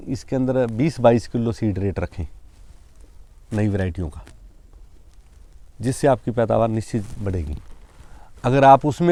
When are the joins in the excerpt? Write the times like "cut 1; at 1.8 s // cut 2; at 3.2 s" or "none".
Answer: none